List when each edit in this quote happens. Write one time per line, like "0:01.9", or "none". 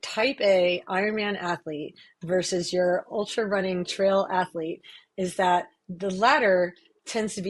none